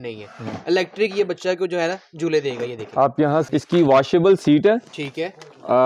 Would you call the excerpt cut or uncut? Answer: cut